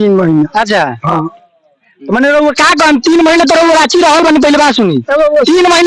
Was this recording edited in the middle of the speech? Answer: no; 0 cuts

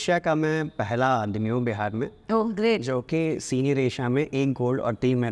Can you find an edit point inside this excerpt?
no; 0 cuts

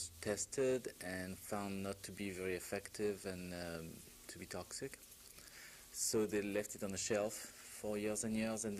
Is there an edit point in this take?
no; 0 cuts

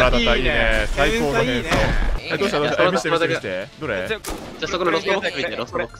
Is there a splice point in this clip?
yes; 1 cut; at 2.2 s

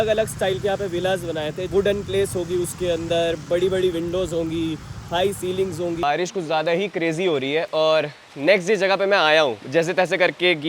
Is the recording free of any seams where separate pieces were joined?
no; 1 cut; at 6.0 s

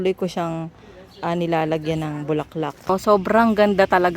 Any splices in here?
yes; 1 cut; at 2.9 s

